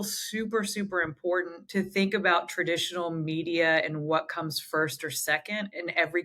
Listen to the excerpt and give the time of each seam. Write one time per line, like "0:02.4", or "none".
none